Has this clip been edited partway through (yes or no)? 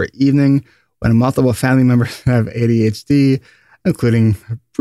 no